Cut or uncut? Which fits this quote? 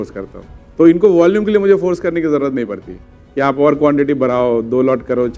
uncut